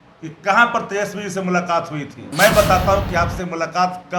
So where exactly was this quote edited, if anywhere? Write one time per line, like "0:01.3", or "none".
0:02.2